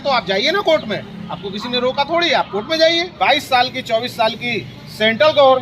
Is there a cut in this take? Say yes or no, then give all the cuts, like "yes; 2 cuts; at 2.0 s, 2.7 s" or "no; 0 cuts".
yes; 1 cut; at 3.1 s